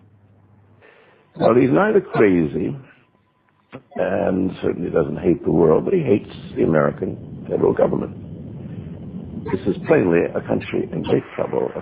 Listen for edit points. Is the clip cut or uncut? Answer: uncut